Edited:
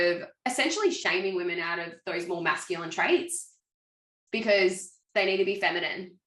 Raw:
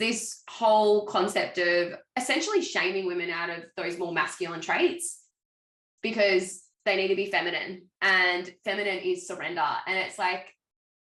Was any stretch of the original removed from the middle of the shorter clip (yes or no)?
no